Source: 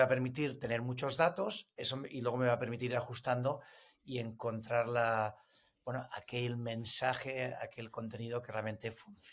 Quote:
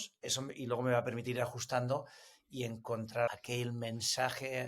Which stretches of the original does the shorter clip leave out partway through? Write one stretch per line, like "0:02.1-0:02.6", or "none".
0:04.9-0:06.1